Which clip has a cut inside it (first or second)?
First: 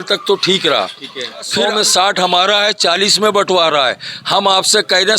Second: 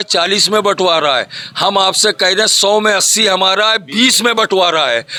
first